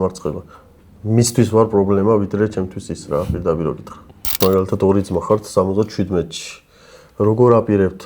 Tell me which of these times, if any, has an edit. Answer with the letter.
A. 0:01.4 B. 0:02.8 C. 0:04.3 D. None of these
C